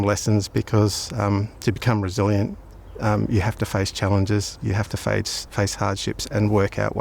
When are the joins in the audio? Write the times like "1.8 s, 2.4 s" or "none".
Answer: none